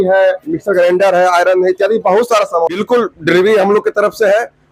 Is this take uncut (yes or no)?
no